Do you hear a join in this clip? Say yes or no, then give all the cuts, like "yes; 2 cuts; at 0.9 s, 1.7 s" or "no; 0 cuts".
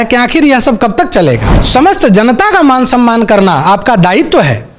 yes; 1 cut; at 1.5 s